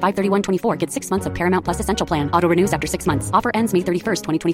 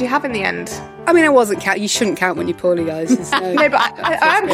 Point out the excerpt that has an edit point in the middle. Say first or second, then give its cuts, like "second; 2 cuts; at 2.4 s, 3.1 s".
second; 1 cut; at 0.9 s